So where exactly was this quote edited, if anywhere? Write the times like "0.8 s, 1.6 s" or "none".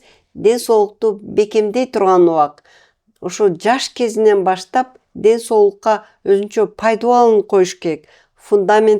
none